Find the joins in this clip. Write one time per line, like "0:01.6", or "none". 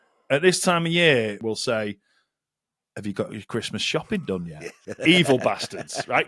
0:01.4
0:04.9